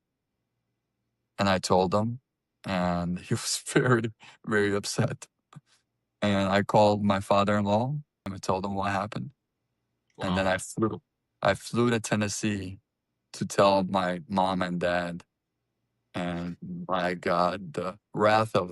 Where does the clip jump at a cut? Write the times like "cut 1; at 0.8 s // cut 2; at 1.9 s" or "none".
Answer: cut 1; at 8.4 s